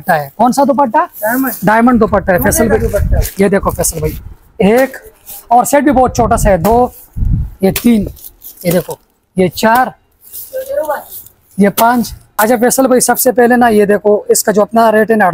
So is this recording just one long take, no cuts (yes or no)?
no